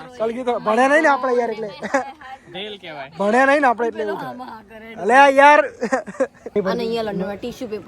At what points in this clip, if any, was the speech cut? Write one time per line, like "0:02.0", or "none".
0:06.6